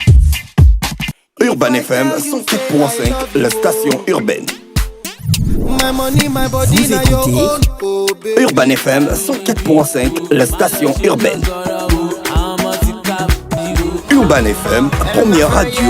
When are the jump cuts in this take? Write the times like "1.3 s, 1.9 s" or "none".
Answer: 1.2 s